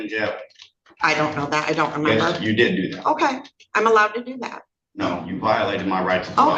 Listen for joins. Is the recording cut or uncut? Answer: uncut